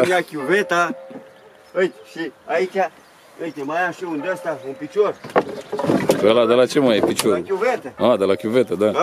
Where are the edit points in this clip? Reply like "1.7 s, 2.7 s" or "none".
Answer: none